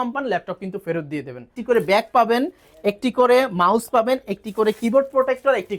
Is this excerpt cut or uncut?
cut